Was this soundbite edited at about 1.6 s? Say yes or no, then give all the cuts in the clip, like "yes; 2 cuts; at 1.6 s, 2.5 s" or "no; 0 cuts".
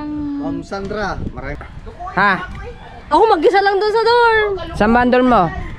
yes; 1 cut; at 1.6 s